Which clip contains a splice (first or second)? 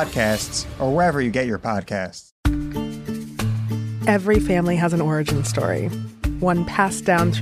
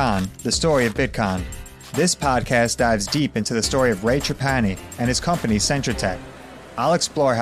first